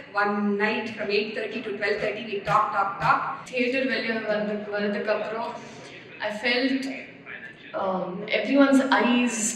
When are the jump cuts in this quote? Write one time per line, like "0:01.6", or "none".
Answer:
0:03.4

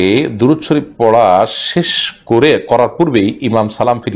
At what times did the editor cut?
none

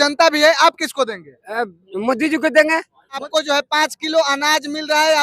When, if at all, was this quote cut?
0:03.2

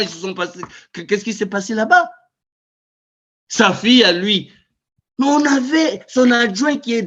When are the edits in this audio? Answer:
none

